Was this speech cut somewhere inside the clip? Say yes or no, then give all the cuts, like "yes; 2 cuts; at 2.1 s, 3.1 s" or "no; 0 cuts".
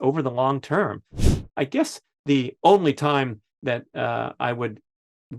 yes; 1 cut; at 1.3 s